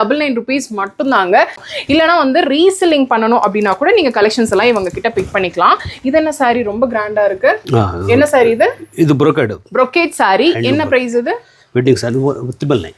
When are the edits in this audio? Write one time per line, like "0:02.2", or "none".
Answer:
0:01.7